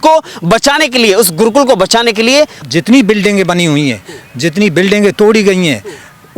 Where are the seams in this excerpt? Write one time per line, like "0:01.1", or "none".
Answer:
0:02.6